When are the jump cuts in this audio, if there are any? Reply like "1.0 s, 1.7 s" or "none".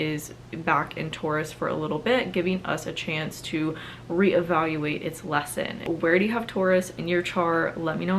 5.8 s